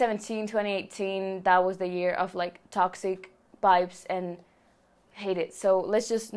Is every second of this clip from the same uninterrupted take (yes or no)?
yes